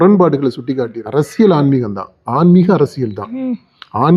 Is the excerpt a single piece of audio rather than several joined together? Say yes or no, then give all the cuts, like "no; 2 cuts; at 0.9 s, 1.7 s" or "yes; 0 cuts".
no; 1 cut; at 1.0 s